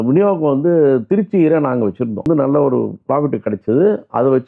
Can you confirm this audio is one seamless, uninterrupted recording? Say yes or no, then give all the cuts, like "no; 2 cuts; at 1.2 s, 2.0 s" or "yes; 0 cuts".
no; 1 cut; at 2.3 s